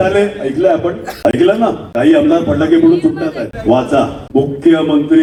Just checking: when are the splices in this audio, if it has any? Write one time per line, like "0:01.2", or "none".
none